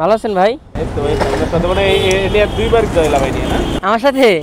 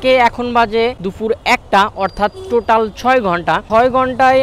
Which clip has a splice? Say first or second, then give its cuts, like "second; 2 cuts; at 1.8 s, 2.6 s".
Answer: second; 1 cut; at 1.0 s